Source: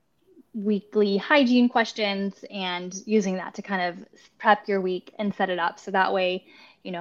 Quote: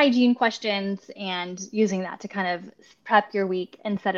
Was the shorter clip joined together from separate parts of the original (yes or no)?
no